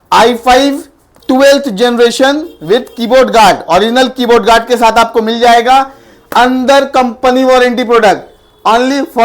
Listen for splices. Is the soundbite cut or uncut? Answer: uncut